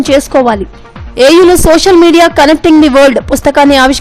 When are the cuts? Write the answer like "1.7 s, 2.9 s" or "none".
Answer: none